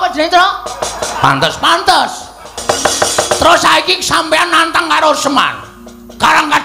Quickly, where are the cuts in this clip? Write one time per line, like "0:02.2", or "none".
0:02.6